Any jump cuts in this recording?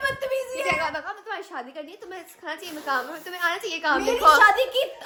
no; 0 cuts

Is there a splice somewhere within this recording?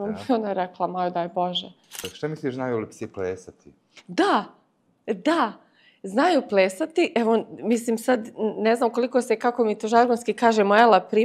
yes; 1 cut; at 2.1 s

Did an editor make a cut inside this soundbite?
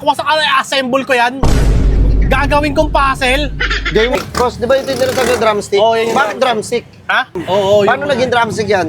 yes; 2 cuts; at 4.2 s, 7.4 s

